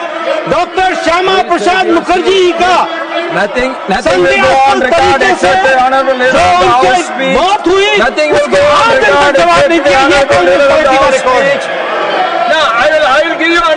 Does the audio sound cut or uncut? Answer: uncut